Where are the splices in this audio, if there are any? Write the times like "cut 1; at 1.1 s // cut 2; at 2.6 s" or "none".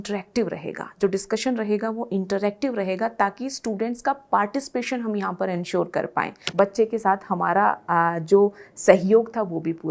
cut 1; at 6.4 s